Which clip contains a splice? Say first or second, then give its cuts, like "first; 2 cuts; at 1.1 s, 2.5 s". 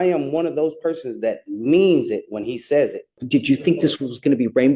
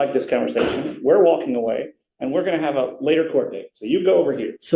first; 1 cut; at 3.2 s